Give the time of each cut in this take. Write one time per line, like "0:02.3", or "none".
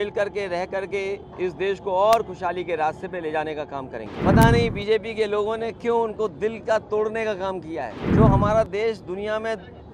0:04.1
0:08.0